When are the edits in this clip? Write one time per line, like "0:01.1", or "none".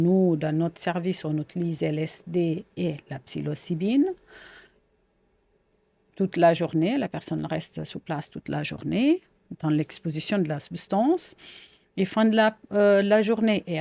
none